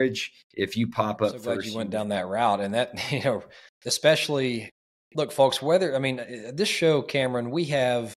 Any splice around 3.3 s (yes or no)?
no